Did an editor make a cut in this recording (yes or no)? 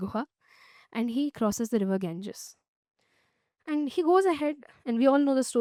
no